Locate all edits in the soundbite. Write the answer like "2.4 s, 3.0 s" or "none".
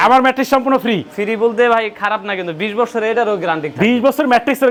none